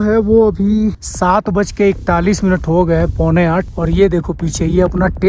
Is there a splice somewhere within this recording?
yes; 2 cuts; at 1.1 s, 3.7 s

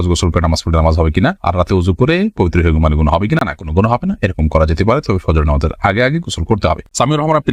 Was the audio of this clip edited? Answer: no; 0 cuts

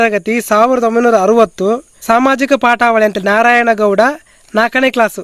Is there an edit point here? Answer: yes; 1 cut; at 2.0 s

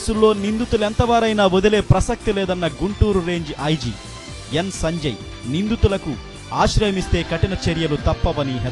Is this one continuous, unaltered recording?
yes; 0 cuts

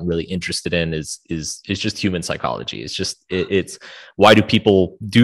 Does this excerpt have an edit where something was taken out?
no; 0 cuts

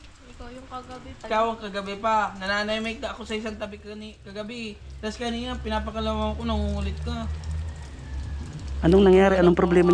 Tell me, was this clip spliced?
yes; 1 cut; at 1.2 s

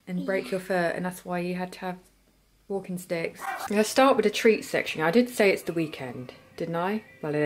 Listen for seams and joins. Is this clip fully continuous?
no; 1 cut; at 3.6 s

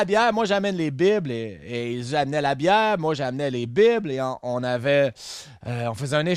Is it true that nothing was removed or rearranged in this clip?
yes; 0 cuts

